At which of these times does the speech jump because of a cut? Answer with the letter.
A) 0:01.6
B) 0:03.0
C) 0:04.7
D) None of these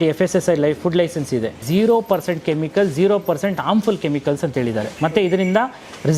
A